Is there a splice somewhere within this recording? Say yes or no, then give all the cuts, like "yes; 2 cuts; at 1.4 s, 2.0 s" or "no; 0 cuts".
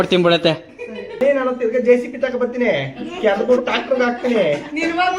yes; 1 cut; at 1.2 s